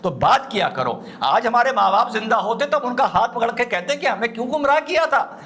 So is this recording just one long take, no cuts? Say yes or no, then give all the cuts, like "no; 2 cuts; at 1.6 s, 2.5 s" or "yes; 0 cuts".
yes; 0 cuts